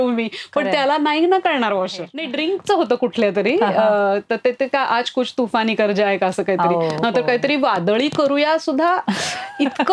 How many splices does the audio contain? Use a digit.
1